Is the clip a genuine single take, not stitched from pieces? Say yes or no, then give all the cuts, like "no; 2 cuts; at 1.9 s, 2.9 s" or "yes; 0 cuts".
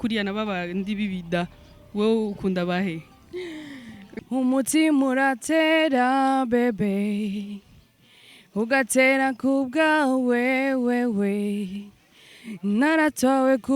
no; 1 cut; at 4.1 s